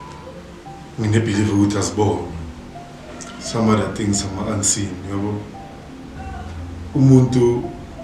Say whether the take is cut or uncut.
cut